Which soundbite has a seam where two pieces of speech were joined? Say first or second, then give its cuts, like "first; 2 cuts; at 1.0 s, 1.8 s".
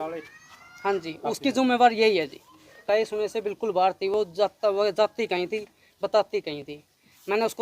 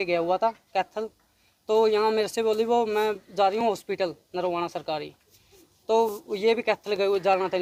first; 1 cut; at 2.8 s